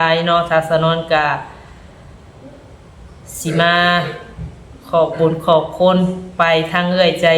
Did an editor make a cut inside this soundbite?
no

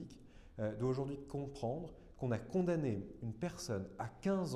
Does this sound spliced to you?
no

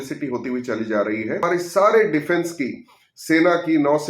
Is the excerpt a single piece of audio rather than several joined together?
no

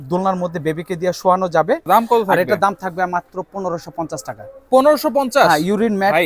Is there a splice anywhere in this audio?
yes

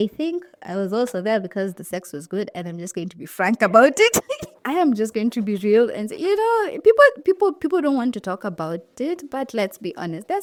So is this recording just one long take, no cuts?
yes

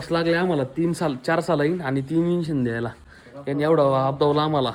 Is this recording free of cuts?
yes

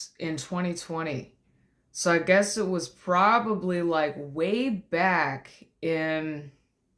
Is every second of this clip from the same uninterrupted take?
yes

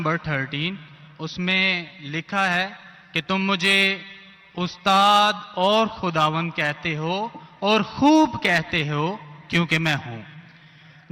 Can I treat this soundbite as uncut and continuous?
yes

